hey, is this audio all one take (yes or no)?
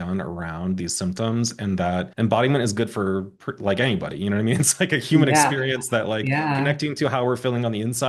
no